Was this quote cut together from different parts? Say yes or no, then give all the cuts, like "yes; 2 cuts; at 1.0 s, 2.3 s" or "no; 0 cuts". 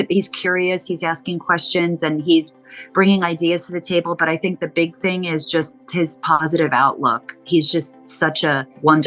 no; 0 cuts